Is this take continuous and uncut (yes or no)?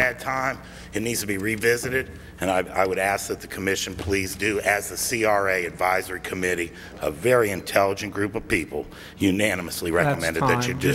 yes